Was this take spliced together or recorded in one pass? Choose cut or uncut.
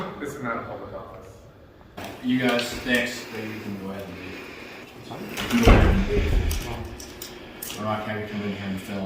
cut